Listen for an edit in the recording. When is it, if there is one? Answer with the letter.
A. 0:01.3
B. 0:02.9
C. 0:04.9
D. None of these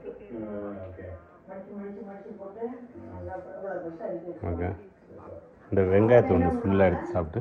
D